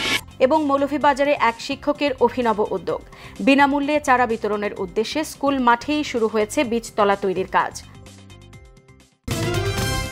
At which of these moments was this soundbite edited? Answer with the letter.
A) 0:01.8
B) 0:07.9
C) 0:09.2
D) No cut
C